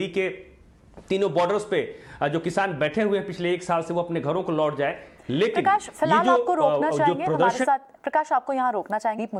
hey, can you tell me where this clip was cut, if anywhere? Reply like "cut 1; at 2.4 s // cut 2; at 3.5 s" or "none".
none